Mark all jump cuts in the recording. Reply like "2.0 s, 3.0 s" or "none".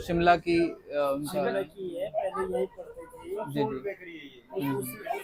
none